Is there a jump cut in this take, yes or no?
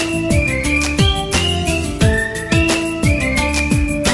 no